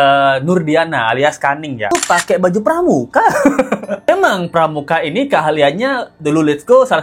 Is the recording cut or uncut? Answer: cut